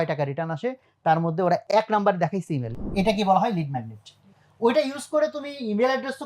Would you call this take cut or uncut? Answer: cut